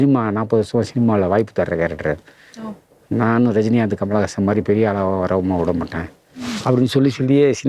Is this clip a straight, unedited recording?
yes; 0 cuts

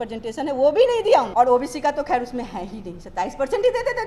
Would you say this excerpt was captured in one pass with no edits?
no; 1 cut; at 1.3 s

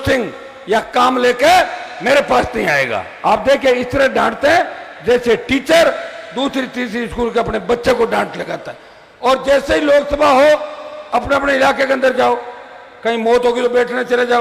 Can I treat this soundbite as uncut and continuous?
yes; 0 cuts

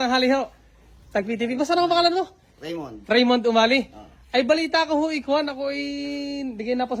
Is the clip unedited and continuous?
yes; 0 cuts

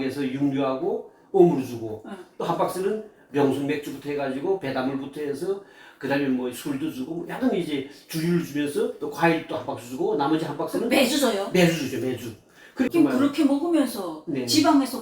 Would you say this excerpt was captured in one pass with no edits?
no; 1 cut; at 12.9 s

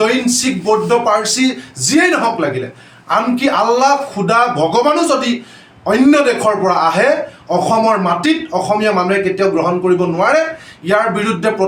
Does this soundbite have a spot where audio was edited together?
no; 0 cuts

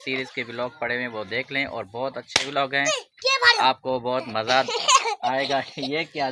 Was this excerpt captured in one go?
yes; 0 cuts

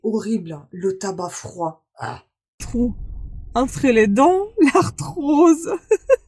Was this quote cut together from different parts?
yes; 1 cut; at 2.6 s

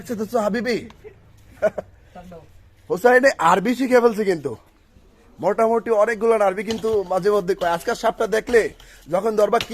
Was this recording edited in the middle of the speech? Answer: no; 0 cuts

